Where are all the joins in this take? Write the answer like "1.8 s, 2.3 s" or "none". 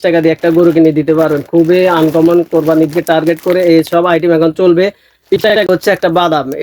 5.7 s

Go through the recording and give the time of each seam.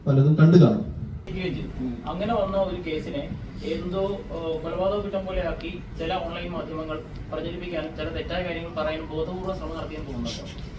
1.2 s

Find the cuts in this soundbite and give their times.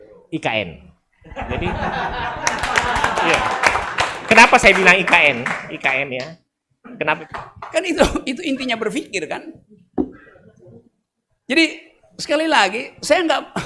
7.2 s

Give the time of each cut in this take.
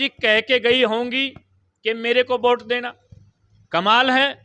none

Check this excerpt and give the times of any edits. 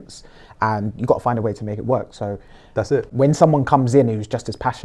3.1 s

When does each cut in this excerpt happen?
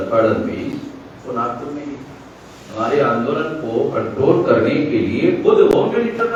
none

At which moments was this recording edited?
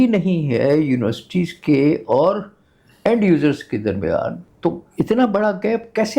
4.5 s

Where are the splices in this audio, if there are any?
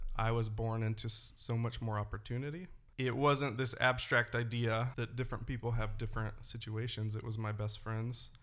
2.8 s, 4.9 s

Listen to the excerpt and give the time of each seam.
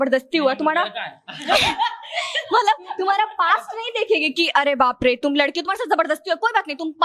none

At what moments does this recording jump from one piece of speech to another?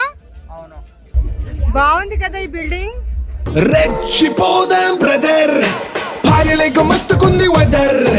none

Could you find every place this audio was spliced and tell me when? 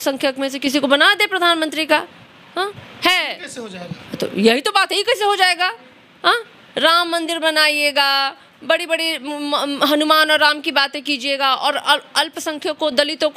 none

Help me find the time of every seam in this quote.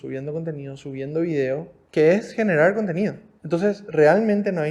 1.8 s, 3.3 s

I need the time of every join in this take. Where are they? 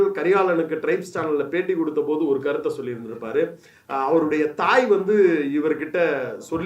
none

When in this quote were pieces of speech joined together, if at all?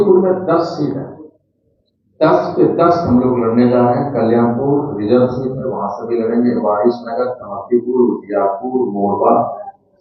none

